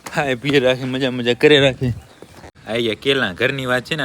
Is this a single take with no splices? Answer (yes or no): no